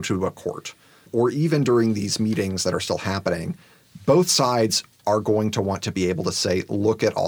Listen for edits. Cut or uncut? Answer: cut